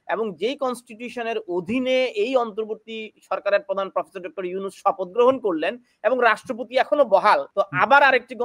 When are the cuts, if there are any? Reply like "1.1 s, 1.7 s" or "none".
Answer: 7.5 s